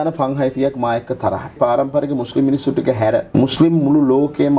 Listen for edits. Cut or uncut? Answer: cut